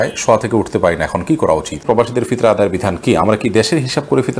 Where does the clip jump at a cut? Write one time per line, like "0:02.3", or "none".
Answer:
0:01.8